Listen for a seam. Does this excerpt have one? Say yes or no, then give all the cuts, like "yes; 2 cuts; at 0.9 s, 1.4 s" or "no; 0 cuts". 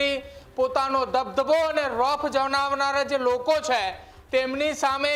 no; 0 cuts